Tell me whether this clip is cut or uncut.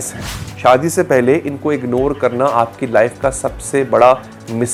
uncut